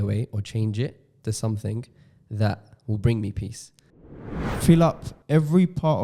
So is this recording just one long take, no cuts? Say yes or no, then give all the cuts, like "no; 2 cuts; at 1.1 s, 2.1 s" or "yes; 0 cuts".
no; 1 cut; at 4.1 s